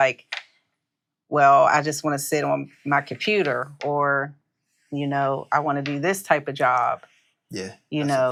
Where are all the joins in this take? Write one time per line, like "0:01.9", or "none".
none